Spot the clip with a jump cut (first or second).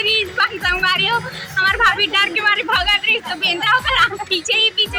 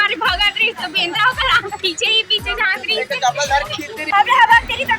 second